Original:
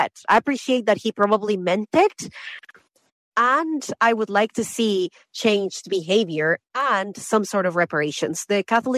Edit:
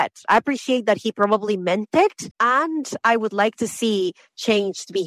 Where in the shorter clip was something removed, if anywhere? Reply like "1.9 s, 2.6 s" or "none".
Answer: 2.3 s